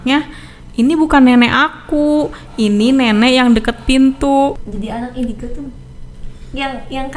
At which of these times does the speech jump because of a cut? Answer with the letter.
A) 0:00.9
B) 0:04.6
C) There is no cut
B